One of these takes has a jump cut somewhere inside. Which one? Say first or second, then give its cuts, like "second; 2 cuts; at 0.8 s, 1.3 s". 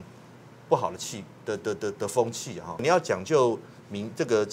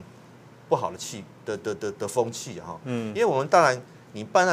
first; 1 cut; at 2.8 s